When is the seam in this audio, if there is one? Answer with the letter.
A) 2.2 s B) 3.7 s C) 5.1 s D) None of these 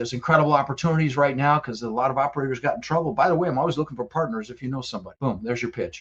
C